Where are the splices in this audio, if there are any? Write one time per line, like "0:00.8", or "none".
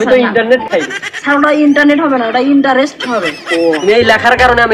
0:03.8